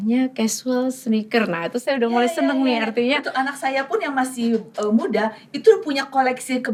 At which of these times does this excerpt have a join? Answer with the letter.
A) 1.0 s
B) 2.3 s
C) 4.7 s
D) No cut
D